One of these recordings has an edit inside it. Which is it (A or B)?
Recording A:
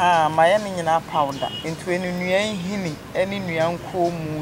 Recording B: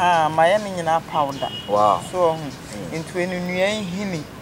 A